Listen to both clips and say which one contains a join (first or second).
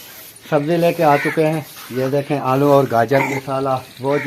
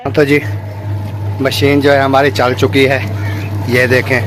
first